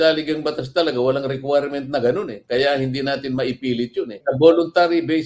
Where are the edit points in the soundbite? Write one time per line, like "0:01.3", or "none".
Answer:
0:04.1